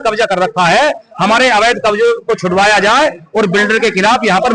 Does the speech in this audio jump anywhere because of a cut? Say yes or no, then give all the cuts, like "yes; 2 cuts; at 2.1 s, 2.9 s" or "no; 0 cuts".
no; 0 cuts